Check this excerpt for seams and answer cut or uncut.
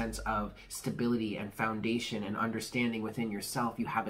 uncut